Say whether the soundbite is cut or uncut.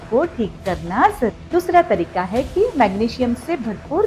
cut